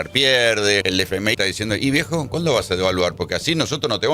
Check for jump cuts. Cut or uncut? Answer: cut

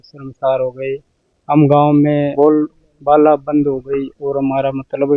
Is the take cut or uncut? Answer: cut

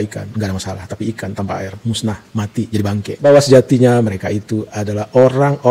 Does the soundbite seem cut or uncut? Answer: cut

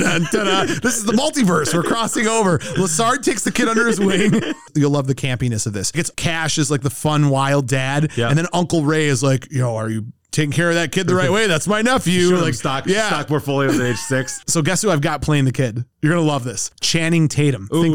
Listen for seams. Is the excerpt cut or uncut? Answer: cut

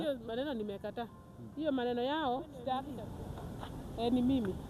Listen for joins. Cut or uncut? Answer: cut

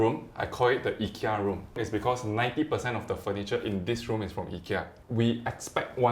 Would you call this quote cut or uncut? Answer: cut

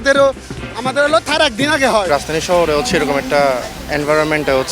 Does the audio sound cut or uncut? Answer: cut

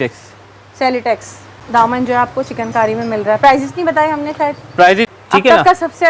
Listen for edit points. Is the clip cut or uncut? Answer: cut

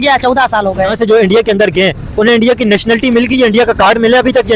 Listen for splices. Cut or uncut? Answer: cut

